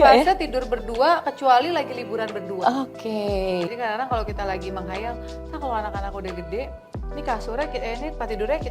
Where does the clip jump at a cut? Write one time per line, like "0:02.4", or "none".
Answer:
0:03.7